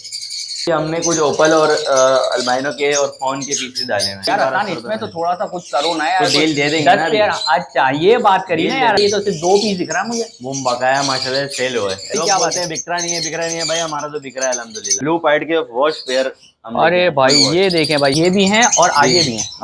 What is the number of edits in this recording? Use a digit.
6